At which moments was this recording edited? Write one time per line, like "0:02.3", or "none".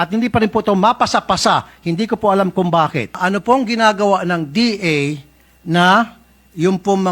0:03.2